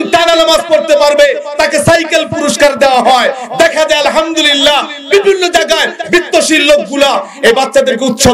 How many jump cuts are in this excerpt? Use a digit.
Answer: 0